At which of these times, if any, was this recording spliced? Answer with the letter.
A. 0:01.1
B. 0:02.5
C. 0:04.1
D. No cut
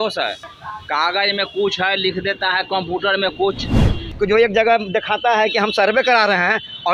C